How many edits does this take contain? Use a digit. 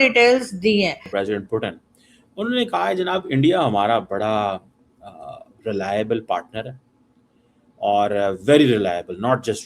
1